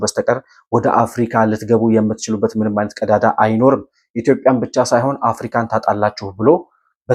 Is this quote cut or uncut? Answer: uncut